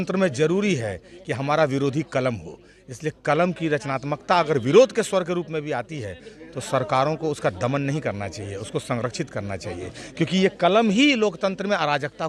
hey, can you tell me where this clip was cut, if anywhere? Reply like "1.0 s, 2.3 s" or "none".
none